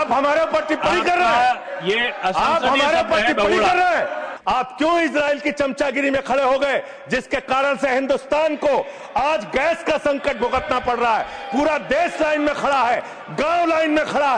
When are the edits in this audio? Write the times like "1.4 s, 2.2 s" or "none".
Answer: 4.3 s